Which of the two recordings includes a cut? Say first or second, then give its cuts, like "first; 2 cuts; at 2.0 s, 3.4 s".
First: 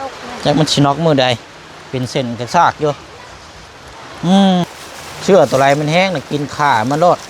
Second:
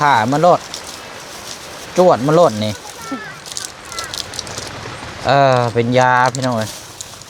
first; 1 cut; at 4.7 s